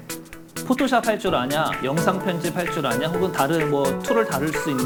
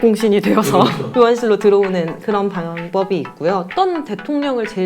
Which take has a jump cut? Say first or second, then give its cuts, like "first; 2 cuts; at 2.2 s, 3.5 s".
second; 2 cuts; at 1.0 s, 3.7 s